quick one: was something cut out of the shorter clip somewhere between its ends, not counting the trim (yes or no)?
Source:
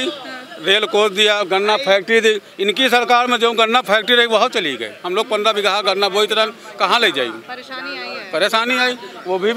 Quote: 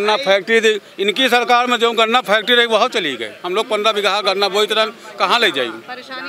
no